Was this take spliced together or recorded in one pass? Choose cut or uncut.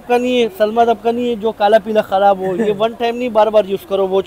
uncut